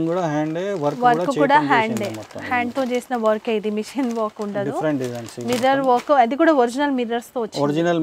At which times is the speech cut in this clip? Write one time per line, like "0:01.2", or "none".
none